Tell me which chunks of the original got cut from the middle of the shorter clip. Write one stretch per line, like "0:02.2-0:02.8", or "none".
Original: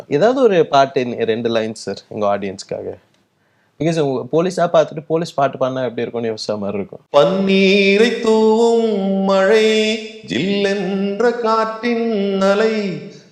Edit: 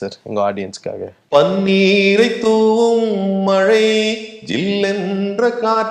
0:03.0-0:07.0